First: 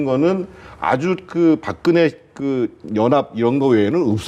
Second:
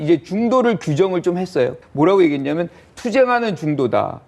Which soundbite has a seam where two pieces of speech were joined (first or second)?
second